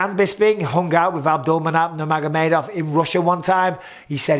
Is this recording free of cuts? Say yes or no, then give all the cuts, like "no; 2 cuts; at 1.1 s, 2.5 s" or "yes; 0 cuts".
yes; 0 cuts